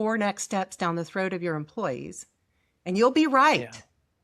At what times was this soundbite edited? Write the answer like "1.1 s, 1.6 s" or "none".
none